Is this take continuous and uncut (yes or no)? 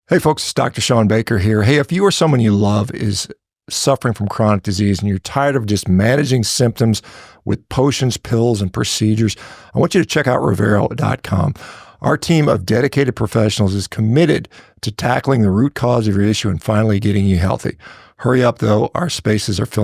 yes